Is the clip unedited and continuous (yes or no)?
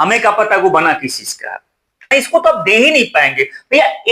no